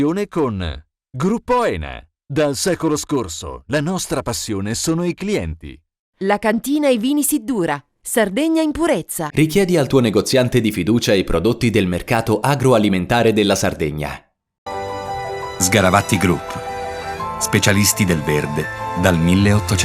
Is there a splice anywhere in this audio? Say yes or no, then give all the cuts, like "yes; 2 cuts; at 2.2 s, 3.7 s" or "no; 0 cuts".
no; 0 cuts